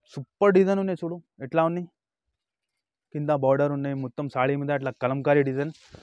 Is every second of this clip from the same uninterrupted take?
yes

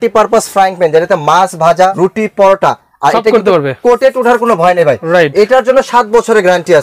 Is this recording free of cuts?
no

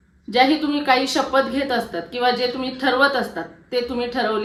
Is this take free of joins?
yes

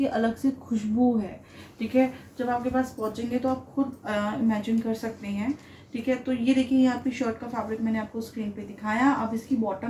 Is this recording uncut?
yes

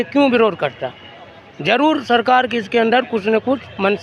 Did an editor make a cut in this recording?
no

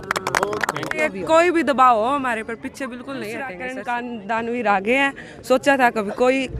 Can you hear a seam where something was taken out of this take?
yes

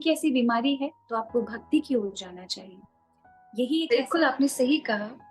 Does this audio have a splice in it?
yes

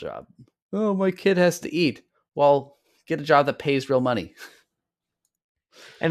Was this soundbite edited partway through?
no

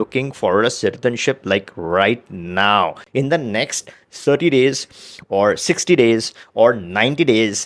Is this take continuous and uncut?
yes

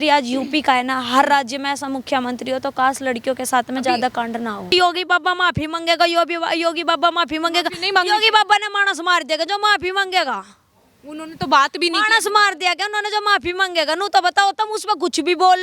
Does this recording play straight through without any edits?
no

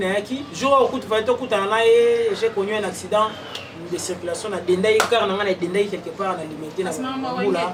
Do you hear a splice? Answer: no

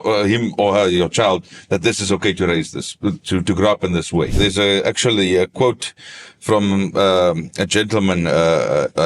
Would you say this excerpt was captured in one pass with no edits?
no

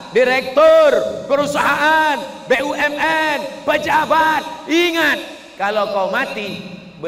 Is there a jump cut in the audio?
no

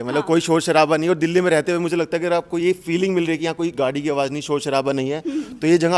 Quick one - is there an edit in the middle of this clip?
no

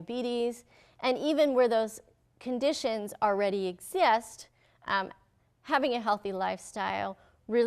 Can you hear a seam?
no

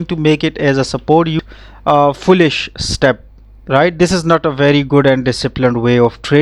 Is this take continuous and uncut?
no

